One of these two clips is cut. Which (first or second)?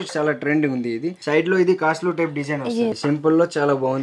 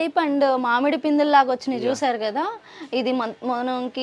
first